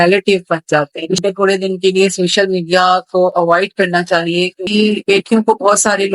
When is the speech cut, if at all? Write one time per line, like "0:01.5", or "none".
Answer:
0:01.2
0:04.6